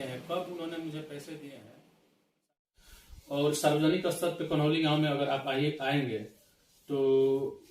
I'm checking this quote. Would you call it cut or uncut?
cut